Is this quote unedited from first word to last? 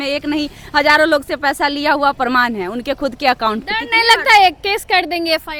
yes; 0 cuts

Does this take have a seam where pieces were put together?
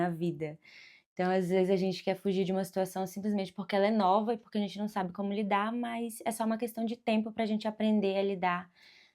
no; 0 cuts

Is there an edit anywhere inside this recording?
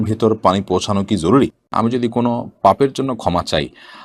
yes; 1 cut; at 1.6 s

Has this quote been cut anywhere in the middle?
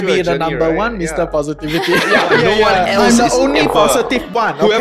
yes; 1 cut; at 2.4 s

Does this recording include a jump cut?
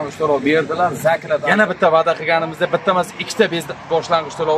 yes; 1 cut; at 1.4 s

